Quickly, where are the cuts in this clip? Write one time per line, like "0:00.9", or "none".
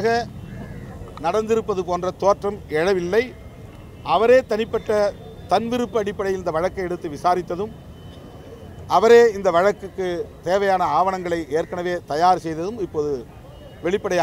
none